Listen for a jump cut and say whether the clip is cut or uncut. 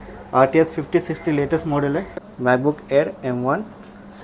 cut